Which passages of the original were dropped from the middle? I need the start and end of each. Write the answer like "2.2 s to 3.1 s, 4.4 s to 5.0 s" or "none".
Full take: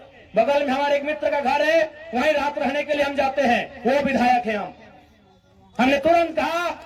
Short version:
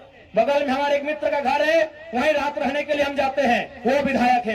none